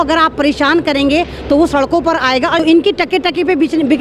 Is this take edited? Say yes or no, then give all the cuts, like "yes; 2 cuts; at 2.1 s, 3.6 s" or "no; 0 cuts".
yes; 1 cut; at 2.6 s